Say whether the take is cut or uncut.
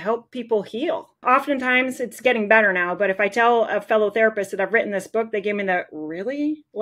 cut